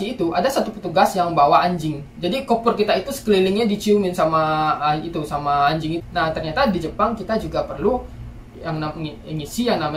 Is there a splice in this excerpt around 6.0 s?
yes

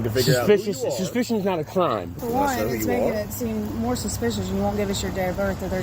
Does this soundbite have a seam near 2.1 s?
yes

